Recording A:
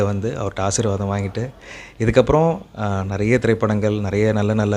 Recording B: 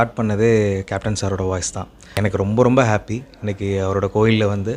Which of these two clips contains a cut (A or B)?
B